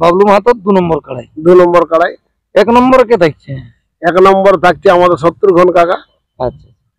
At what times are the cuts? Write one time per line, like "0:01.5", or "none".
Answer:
none